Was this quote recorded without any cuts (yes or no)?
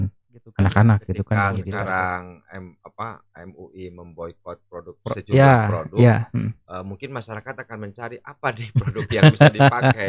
no